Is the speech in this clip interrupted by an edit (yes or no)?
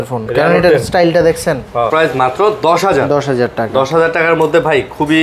yes